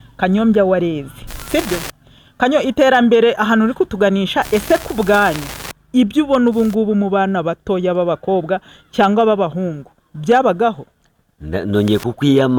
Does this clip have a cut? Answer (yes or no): no